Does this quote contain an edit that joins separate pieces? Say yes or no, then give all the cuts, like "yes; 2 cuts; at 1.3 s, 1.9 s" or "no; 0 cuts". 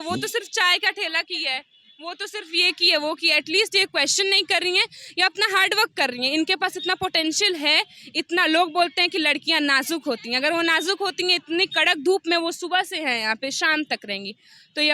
no; 0 cuts